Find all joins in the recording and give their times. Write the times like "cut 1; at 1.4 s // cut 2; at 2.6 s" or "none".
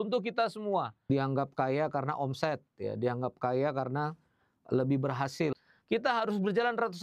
cut 1; at 1.0 s // cut 2; at 5.6 s